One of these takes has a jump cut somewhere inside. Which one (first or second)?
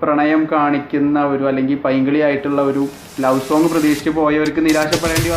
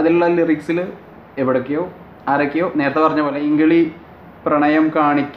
second